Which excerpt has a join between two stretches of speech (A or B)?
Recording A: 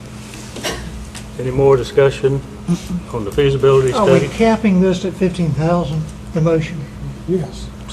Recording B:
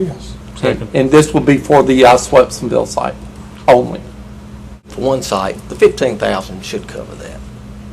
B